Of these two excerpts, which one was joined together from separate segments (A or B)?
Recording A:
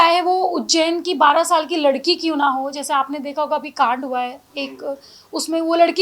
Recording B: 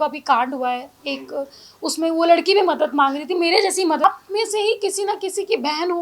B